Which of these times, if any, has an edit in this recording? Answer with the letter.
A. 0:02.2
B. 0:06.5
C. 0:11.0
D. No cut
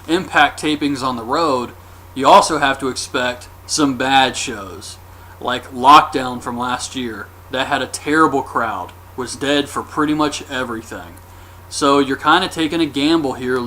B